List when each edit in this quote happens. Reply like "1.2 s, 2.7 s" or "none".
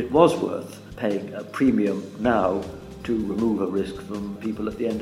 none